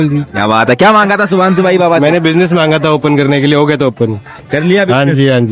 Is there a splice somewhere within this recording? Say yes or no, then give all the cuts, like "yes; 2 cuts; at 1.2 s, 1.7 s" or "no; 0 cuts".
no; 0 cuts